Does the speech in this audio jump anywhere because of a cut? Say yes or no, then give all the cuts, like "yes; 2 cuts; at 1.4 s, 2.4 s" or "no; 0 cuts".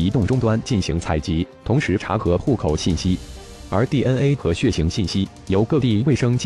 yes; 1 cut; at 3.6 s